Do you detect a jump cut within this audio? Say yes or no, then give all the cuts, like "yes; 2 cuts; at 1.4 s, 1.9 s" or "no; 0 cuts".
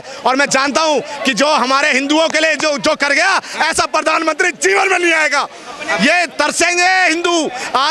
no; 0 cuts